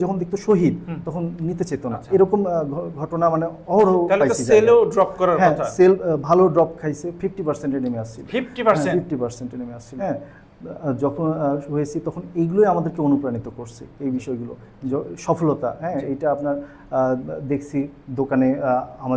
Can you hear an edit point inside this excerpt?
yes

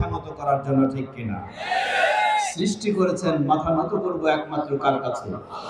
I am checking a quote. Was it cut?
no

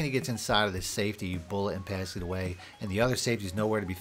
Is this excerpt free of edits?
yes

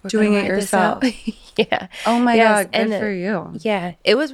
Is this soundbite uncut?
yes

